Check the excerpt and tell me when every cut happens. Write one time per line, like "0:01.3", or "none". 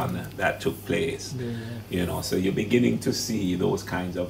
none